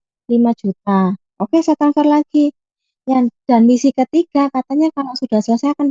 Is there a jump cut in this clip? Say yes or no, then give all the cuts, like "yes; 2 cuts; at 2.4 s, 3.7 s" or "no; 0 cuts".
no; 0 cuts